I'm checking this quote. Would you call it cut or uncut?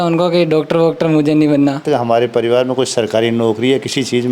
cut